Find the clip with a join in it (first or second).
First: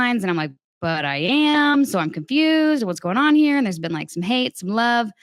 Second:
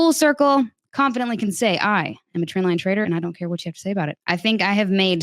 second